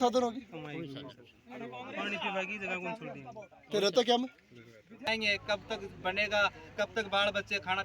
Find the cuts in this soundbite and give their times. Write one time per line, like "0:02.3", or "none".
0:05.1